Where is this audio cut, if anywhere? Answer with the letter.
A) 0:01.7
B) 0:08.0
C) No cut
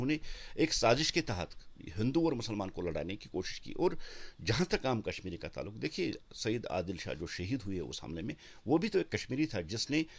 C